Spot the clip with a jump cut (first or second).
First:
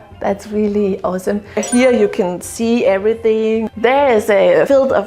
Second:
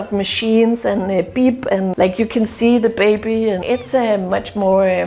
first